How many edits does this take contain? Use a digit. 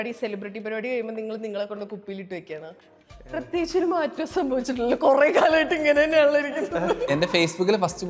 1